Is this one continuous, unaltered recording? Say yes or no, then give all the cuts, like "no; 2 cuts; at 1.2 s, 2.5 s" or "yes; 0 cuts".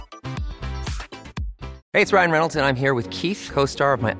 no; 1 cut; at 1.8 s